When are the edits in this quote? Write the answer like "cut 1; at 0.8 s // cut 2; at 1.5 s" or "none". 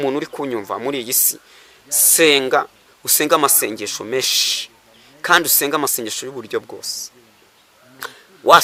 none